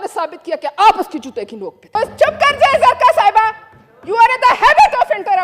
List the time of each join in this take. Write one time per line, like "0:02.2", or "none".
0:01.8